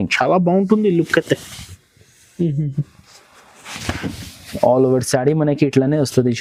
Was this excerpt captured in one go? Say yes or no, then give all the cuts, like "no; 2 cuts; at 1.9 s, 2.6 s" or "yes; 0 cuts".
yes; 0 cuts